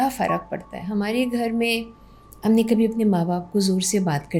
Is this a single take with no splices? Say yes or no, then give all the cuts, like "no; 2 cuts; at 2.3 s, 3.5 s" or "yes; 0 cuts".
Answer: yes; 0 cuts